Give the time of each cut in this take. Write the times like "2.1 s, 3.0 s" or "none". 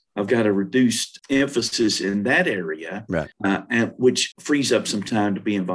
1.1 s, 3.3 s, 4.3 s